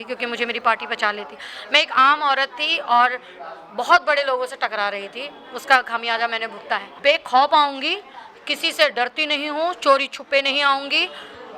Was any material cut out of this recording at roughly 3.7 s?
no; 1 cut; at 7.0 s

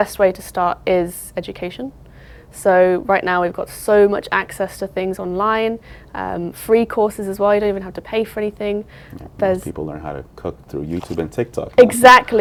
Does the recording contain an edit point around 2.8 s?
no; 0 cuts

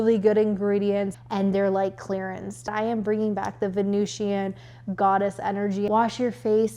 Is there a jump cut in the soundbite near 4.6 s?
no; 3 cuts; at 1.2 s, 2.7 s, 5.9 s

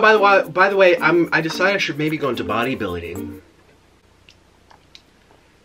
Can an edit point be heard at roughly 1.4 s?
no; 0 cuts

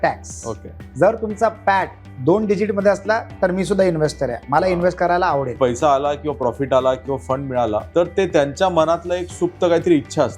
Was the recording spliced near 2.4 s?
no; 2 cuts; at 5.6 s, 7.9 s

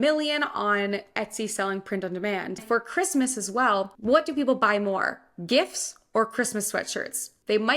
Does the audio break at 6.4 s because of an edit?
no; 1 cut; at 2.6 s

